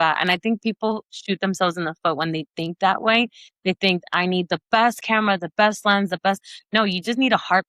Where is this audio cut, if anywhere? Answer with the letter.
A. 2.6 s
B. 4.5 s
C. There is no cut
C